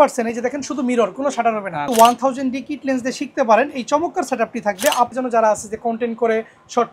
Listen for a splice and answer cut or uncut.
cut